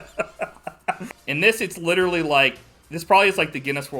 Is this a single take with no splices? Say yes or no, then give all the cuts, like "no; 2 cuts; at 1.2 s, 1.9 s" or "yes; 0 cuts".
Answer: no; 1 cut; at 1.0 s